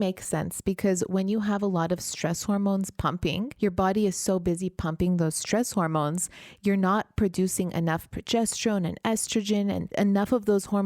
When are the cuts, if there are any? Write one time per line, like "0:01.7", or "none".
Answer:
0:03.5
0:09.9